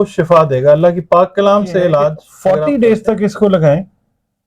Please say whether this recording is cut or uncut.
cut